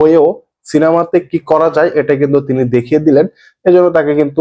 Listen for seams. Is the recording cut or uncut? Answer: uncut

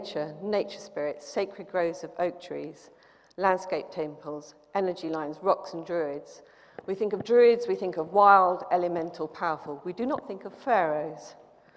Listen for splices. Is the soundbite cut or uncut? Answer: uncut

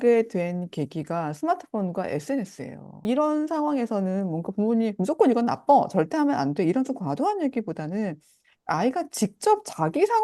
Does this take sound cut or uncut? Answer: cut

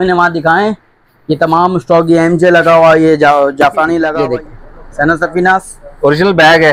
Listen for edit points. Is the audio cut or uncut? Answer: cut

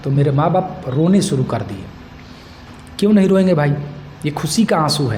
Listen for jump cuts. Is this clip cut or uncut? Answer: uncut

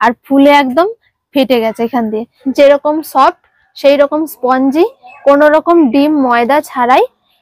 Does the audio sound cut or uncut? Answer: cut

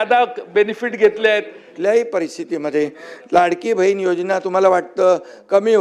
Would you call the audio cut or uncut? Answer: cut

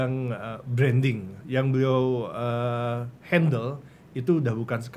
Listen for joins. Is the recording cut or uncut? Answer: cut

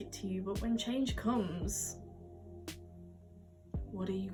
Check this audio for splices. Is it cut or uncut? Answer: uncut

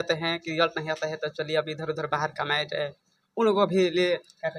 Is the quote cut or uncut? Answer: uncut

